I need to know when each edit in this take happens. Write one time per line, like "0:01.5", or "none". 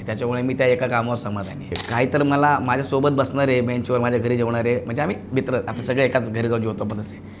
0:01.8